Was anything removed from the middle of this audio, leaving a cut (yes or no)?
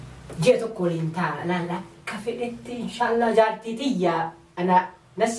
no